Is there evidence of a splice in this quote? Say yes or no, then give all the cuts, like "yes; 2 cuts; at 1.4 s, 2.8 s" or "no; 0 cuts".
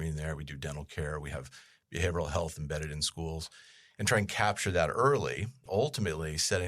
yes; 1 cut; at 5.6 s